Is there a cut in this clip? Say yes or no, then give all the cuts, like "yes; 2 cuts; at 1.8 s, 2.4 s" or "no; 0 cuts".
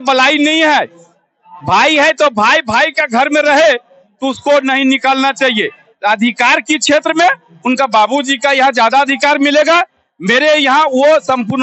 no; 0 cuts